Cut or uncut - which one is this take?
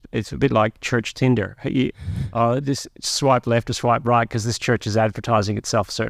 uncut